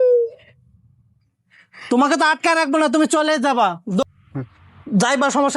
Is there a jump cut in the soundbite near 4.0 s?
yes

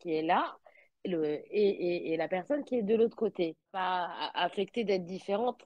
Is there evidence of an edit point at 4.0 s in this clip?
yes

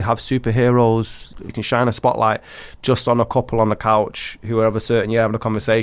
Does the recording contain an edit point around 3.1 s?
no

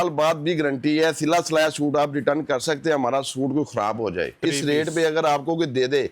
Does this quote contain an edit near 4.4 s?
yes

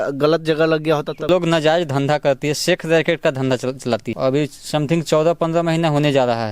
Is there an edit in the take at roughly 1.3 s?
yes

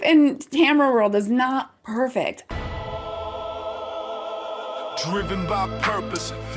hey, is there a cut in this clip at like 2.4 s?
yes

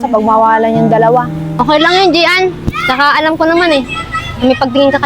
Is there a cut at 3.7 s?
no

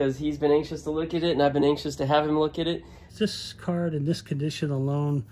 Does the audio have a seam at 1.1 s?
no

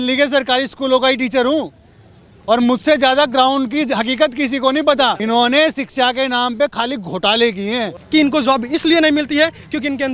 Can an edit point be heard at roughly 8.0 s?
yes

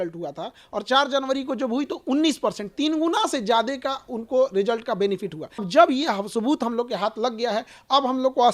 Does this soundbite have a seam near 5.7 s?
yes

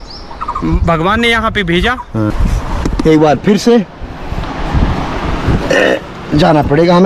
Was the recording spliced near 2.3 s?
yes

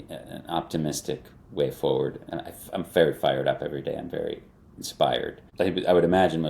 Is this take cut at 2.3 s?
yes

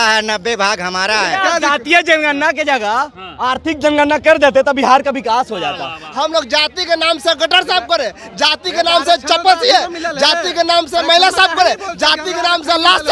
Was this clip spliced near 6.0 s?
yes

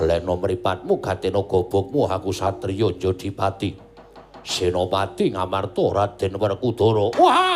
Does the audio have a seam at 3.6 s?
no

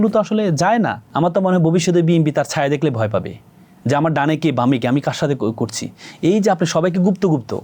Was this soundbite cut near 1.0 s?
yes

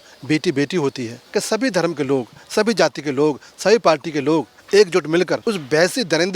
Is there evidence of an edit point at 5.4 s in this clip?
yes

